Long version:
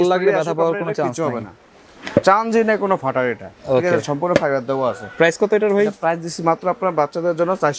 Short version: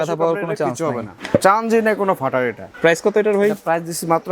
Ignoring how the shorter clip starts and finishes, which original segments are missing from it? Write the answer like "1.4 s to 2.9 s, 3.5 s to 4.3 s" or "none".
1.5 s to 1.9 s, 3.5 s to 5.0 s